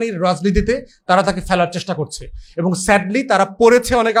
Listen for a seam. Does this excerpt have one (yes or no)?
no